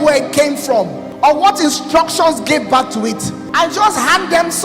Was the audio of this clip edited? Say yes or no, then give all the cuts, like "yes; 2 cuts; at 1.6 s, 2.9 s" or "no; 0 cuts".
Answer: yes; 2 cuts; at 1.0 s, 3.4 s